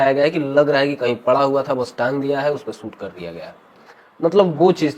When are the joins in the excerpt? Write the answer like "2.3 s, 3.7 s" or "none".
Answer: none